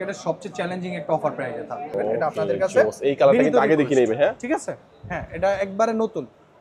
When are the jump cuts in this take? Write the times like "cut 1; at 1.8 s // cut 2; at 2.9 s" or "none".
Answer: cut 1; at 1.9 s